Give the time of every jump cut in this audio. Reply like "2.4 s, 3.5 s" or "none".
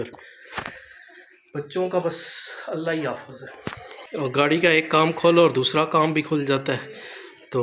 4.0 s